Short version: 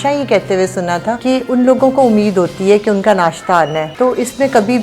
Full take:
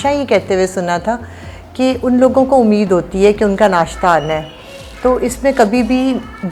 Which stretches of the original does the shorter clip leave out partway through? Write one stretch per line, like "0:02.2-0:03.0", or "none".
0:01.2-0:01.7
0:04.4-0:04.9